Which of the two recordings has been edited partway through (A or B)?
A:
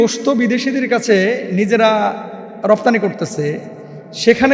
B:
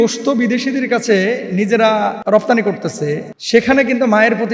B